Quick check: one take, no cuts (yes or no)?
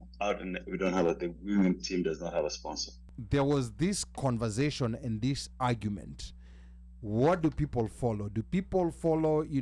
no